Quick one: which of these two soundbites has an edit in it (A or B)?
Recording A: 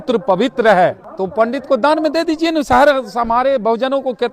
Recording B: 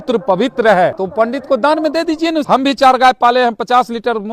B